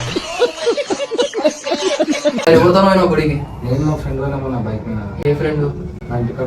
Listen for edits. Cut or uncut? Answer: uncut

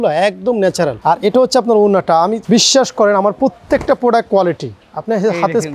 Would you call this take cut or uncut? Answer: cut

